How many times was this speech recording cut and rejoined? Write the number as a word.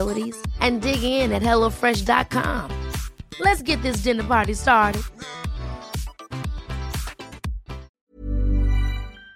one